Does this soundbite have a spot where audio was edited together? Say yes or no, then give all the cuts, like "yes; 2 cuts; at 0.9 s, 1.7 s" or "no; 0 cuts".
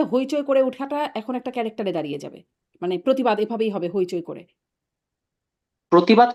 no; 0 cuts